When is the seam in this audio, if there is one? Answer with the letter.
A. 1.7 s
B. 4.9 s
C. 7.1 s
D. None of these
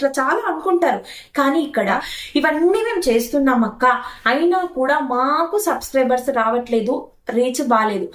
A